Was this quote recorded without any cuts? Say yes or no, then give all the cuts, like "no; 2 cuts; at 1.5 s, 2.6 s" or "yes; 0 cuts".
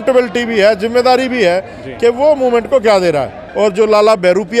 no; 1 cut; at 3.4 s